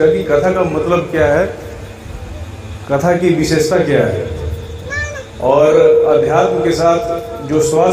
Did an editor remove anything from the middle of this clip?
no; 0 cuts

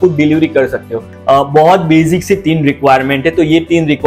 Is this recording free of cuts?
no; 1 cut; at 1.1 s

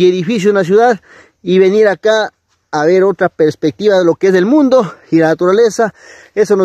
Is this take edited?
no; 0 cuts

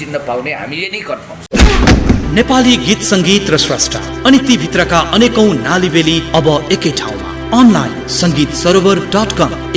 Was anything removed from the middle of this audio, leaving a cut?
yes; 1 cut; at 1.3 s

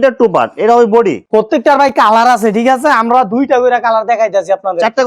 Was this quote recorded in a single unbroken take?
yes; 0 cuts

